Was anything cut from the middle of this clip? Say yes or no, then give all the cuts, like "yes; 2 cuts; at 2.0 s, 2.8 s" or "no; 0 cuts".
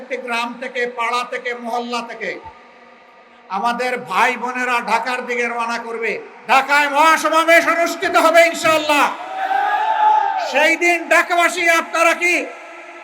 yes; 1 cut; at 6.3 s